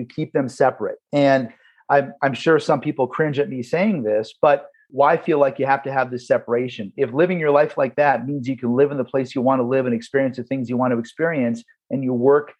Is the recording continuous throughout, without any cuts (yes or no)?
no